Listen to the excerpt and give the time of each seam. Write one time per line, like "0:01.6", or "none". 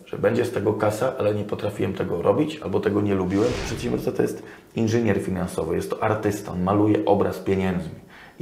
0:03.6